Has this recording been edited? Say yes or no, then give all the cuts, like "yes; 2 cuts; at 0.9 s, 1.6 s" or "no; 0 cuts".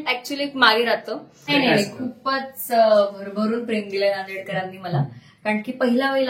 yes; 1 cut; at 1.5 s